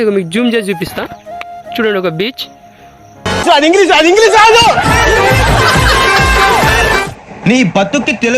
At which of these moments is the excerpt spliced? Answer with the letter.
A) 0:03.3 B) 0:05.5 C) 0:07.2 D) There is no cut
A